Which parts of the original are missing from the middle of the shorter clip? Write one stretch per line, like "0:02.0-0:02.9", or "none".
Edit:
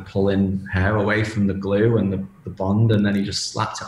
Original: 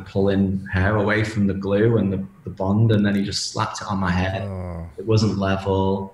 none